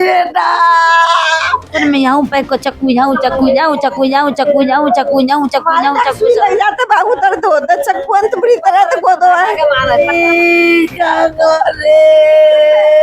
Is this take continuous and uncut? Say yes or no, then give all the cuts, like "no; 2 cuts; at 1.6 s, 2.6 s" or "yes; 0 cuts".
no; 2 cuts; at 1.7 s, 10.1 s